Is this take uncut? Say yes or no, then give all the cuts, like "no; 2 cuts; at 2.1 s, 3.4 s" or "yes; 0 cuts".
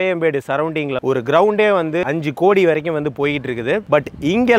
no; 2 cuts; at 1.0 s, 2.0 s